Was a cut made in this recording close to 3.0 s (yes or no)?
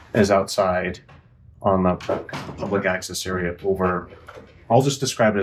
no